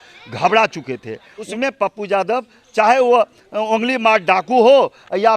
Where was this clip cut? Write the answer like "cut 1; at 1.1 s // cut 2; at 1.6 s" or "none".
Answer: cut 1; at 1.4 s